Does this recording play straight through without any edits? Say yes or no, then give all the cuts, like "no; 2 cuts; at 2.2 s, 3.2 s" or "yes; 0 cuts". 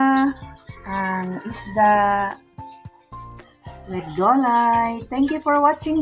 yes; 0 cuts